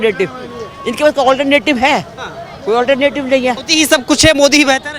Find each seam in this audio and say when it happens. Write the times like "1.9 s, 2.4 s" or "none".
3.6 s